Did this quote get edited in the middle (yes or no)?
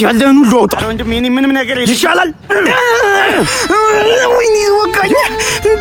no